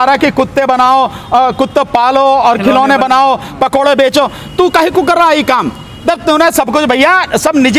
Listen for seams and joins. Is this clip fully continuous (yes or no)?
yes